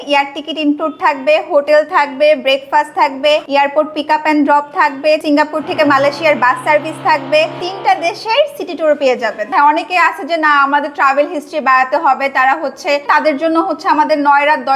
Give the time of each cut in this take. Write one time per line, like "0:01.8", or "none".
0:03.5
0:05.2
0:07.6
0:09.5
0:13.1